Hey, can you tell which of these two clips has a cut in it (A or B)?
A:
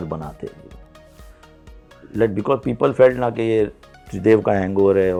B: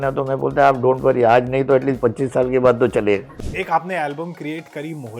B